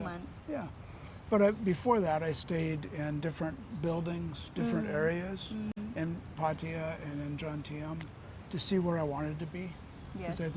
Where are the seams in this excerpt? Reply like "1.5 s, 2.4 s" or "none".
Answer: none

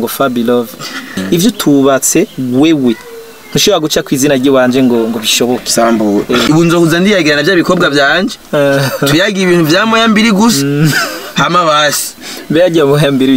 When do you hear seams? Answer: 1.2 s, 6.4 s

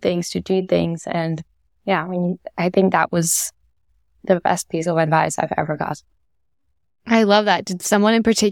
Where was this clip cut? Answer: none

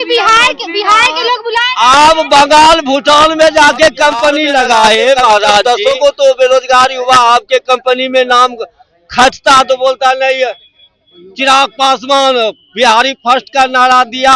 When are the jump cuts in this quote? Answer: 5.6 s

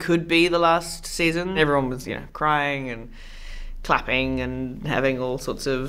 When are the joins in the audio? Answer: 1.6 s

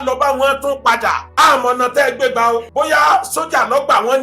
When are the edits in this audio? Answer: 1.2 s, 2.7 s

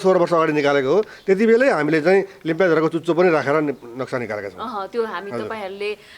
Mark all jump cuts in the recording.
none

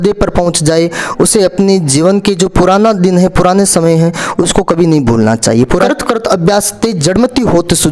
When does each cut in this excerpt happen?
5.8 s

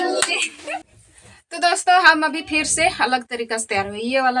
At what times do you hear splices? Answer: 0.9 s

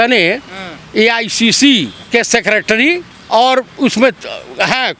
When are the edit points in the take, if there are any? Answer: 2.0 s, 3.1 s

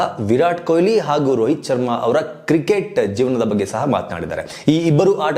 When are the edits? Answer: none

